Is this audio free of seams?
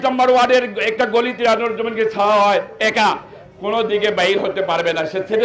yes; 0 cuts

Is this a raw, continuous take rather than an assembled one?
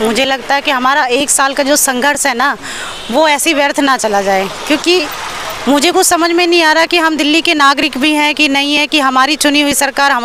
yes; 0 cuts

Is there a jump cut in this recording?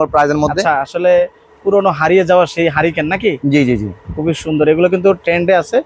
no; 0 cuts

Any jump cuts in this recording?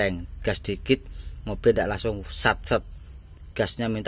no; 0 cuts

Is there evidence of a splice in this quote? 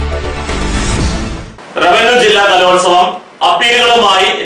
yes; 1 cut; at 1.5 s

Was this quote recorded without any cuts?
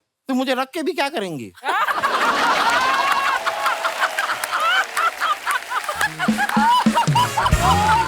yes; 0 cuts

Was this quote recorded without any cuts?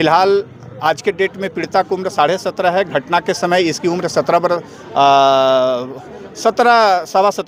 yes; 0 cuts

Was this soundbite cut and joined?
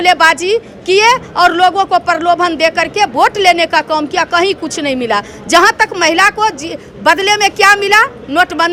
no; 0 cuts

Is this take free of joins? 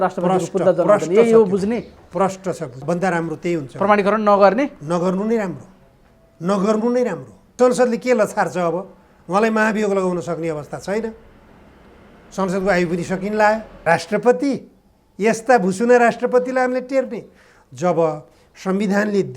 no; 3 cuts; at 2.8 s, 7.6 s, 13.7 s

